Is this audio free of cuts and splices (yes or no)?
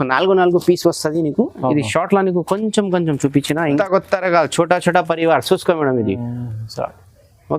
no